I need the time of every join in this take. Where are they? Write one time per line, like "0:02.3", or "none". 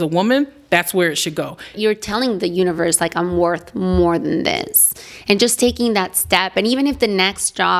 0:01.8